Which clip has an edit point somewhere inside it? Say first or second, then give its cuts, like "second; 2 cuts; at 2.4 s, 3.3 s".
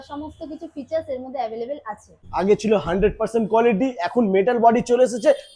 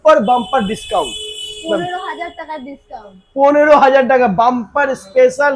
first; 1 cut; at 2.2 s